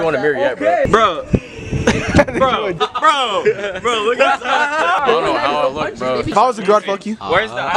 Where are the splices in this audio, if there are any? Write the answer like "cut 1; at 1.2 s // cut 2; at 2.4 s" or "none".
cut 1; at 0.8 s // cut 2; at 2.8 s // cut 3; at 5.0 s // cut 4; at 6.3 s

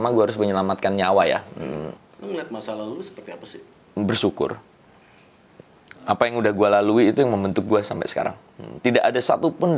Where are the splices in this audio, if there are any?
cut 1; at 1.9 s

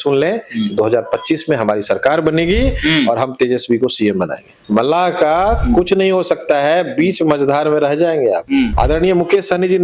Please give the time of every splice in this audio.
cut 1; at 4.5 s // cut 2; at 8.7 s

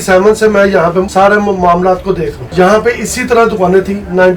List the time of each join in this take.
cut 1; at 1.1 s // cut 2; at 2.4 s

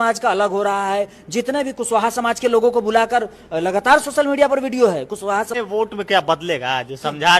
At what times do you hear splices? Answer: cut 1; at 5.5 s

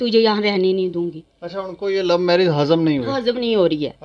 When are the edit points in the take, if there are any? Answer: none

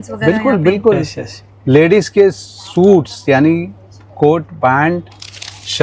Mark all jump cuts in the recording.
none

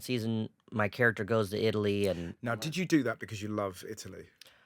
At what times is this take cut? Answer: none

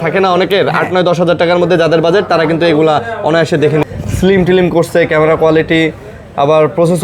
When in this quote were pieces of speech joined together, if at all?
cut 1; at 3.8 s

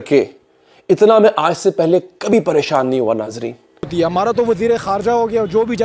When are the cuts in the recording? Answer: cut 1; at 3.9 s

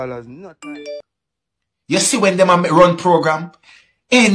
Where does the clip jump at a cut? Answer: cut 1; at 1.1 s

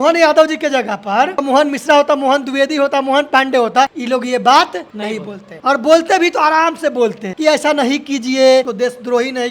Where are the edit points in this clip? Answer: cut 1; at 1.4 s // cut 2; at 4.0 s // cut 3; at 5.1 s // cut 4; at 7.3 s // cut 5; at 8.7 s

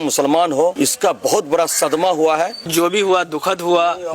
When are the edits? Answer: cut 1; at 0.7 s // cut 2; at 2.7 s

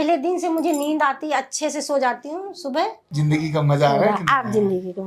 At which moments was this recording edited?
cut 1; at 3.0 s

